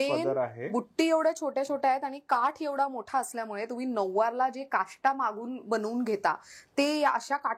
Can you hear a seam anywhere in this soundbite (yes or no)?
no